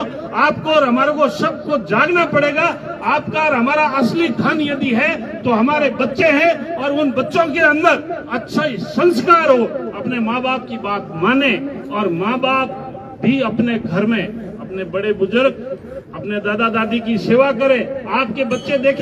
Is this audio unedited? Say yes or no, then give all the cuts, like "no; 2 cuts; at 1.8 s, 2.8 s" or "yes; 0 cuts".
yes; 0 cuts